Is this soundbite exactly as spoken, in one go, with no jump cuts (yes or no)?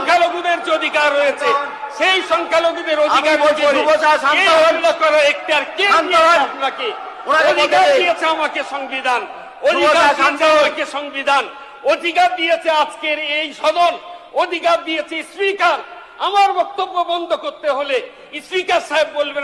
yes